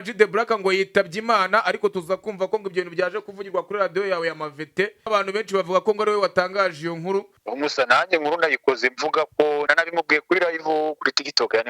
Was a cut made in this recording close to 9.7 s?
yes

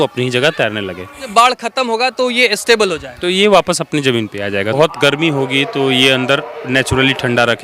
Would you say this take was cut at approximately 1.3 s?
yes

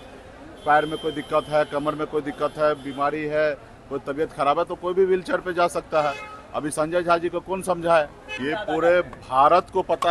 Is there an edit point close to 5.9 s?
no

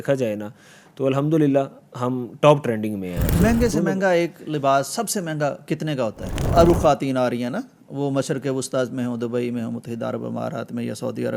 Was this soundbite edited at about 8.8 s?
no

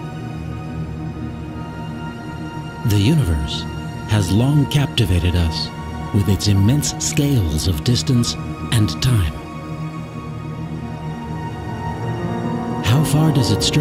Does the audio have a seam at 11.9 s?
no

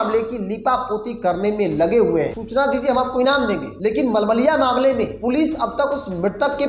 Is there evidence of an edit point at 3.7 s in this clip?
yes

